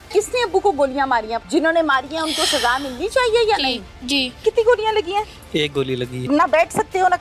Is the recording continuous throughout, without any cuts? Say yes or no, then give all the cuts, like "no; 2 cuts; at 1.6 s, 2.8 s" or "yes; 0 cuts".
no; 3 cuts; at 1.4 s, 4.4 s, 6.3 s